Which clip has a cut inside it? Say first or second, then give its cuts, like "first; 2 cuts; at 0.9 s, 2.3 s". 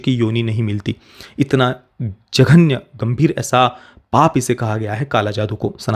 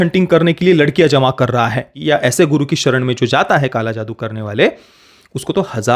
second; 1 cut; at 1.9 s